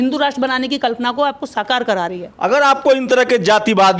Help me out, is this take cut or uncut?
uncut